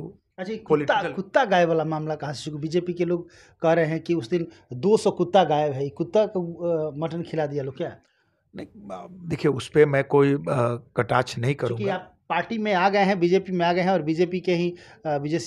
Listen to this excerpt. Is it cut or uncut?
uncut